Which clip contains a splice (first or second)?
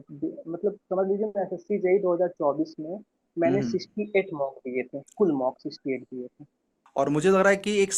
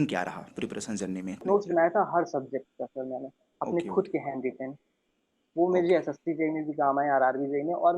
second